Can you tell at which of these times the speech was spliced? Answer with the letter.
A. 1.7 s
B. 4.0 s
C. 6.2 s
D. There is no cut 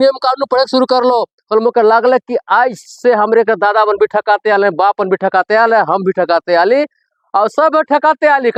D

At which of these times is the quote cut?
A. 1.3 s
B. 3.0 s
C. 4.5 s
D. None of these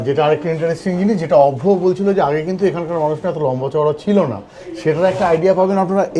D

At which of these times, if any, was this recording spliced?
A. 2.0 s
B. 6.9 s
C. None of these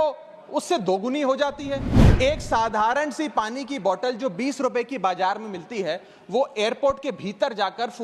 A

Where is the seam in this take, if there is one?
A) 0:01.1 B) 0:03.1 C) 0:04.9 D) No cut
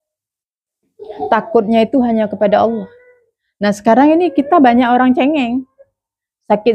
D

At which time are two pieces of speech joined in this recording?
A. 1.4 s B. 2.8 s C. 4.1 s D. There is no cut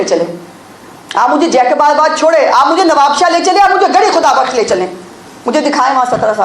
D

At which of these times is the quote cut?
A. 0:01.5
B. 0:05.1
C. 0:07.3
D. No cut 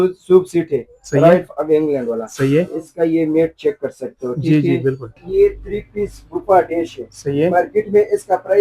B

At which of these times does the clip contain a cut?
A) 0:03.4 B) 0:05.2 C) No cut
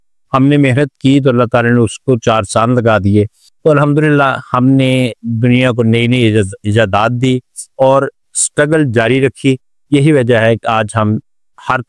A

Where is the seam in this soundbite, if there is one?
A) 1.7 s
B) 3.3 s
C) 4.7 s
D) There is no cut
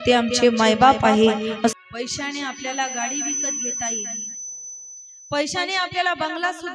A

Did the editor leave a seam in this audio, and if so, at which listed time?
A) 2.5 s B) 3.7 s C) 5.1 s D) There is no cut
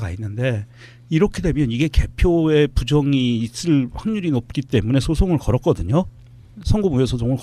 D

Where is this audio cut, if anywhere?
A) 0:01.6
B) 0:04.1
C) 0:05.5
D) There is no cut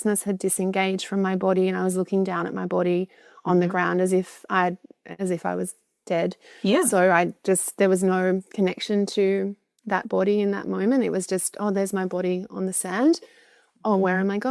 D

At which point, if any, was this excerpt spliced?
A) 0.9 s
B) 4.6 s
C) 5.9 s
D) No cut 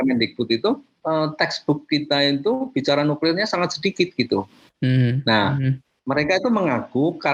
A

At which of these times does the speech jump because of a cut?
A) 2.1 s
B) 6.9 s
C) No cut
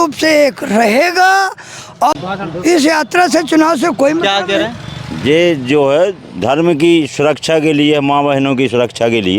A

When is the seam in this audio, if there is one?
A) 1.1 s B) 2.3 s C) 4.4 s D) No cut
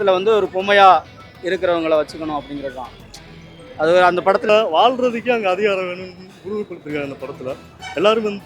C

